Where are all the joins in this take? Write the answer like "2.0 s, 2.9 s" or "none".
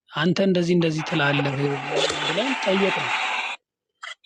none